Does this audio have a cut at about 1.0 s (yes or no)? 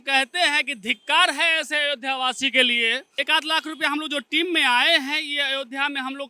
no